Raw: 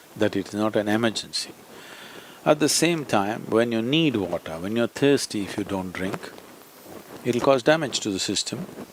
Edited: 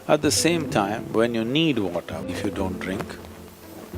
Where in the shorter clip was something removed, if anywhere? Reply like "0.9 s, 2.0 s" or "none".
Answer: 2.3 s